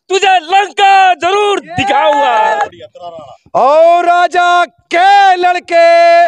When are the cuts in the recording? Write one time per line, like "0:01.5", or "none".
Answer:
0:02.5